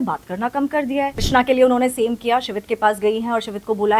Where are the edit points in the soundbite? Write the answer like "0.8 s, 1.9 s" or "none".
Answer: 1.2 s